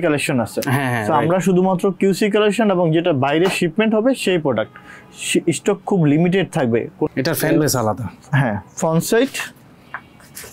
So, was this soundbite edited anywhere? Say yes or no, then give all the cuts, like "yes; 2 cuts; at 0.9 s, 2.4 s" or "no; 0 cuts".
yes; 1 cut; at 7.1 s